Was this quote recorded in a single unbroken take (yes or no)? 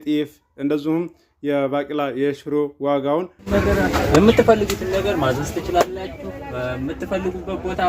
no